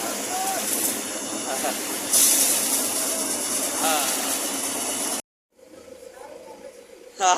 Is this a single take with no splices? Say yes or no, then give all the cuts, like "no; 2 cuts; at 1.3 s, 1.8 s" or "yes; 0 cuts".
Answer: no; 1 cut; at 5.2 s